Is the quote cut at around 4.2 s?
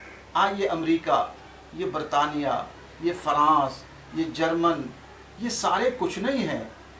no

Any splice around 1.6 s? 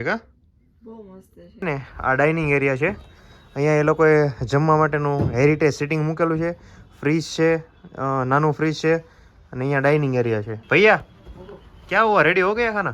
yes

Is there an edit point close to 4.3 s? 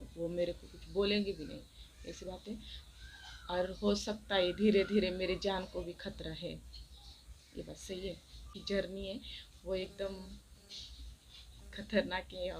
no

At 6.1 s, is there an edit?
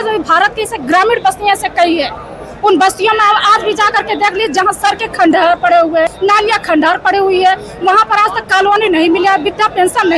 yes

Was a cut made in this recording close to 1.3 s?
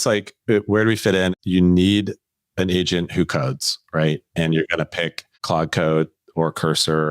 yes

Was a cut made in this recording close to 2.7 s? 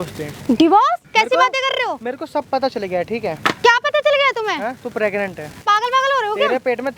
no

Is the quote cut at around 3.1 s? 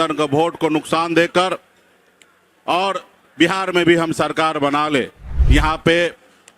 no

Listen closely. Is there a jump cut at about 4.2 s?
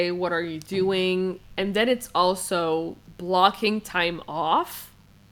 no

